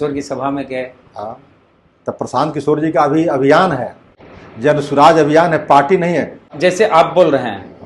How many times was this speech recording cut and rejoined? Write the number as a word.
one